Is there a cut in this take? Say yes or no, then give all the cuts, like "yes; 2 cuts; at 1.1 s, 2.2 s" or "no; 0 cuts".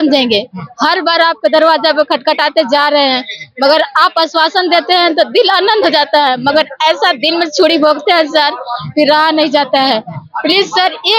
no; 0 cuts